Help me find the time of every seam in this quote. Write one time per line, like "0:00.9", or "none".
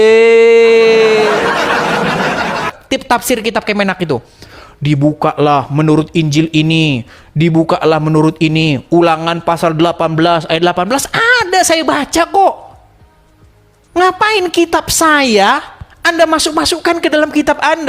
0:02.8